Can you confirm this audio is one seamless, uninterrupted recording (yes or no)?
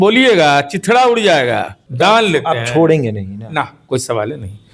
no